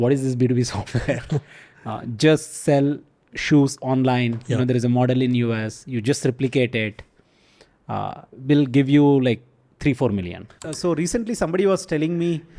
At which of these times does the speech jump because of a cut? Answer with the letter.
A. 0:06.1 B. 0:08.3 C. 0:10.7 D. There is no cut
C